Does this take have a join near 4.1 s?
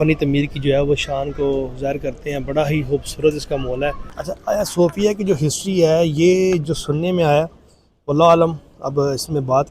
yes; 1 cut; at 4.1 s

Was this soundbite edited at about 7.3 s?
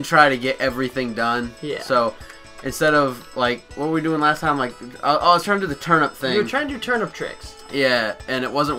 yes; 1 cut; at 7.3 s

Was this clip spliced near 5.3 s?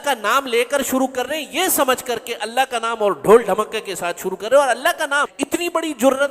yes; 1 cut; at 5.3 s

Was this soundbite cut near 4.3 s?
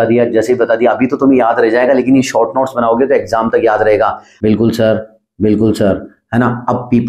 yes; 1 cut; at 4.3 s

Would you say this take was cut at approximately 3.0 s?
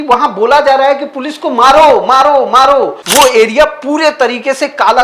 yes; 1 cut; at 3.0 s

